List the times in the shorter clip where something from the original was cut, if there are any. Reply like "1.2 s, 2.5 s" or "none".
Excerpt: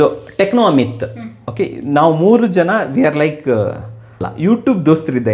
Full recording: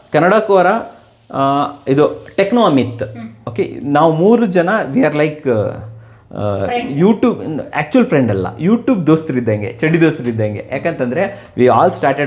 4.3 s